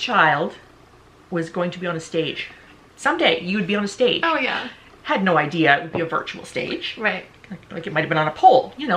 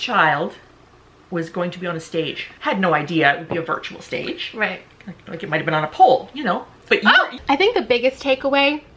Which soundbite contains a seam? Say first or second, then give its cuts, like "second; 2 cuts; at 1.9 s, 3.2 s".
second; 2 cuts; at 2.5 s, 7.4 s